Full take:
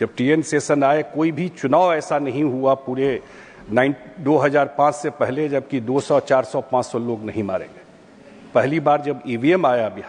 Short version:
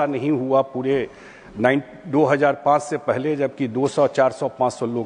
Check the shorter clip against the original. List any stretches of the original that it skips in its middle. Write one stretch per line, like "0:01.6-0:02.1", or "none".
none

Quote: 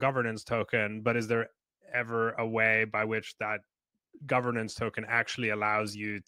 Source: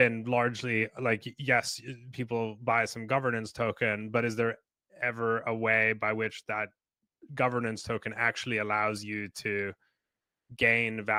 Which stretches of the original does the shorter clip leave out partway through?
none

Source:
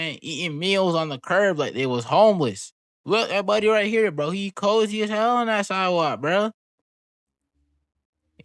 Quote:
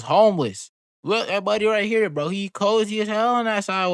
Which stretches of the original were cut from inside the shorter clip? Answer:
none

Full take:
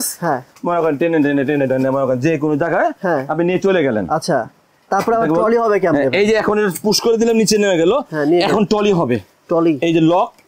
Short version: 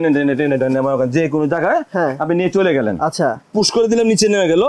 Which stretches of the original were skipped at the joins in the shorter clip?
0:04.6-0:06.8

